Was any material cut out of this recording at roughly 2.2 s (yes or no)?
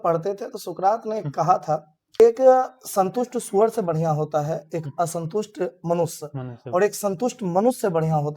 yes